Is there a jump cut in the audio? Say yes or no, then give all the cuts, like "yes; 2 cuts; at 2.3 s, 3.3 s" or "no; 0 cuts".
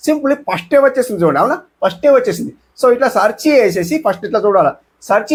no; 0 cuts